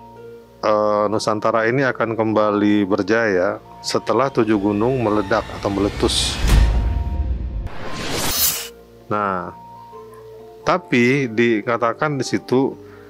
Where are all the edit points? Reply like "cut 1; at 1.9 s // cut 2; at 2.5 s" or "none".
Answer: cut 1; at 6.3 s // cut 2; at 8.6 s

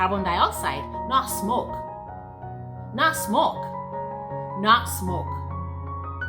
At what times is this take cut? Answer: cut 1; at 5.2 s

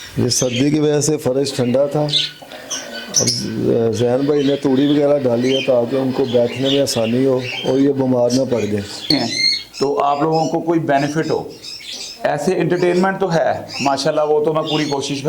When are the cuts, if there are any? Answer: cut 1; at 9.0 s

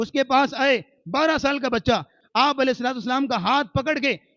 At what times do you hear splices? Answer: cut 1; at 2.2 s

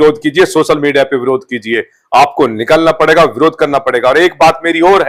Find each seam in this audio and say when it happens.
none

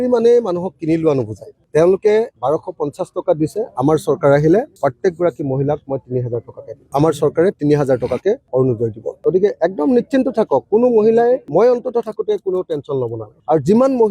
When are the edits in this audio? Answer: none

